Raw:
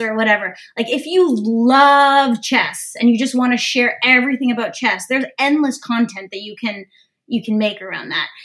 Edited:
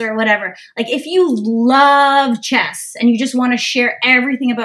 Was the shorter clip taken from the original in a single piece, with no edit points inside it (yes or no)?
yes